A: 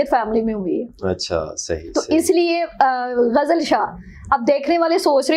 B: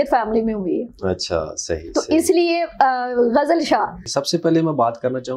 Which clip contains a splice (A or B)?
B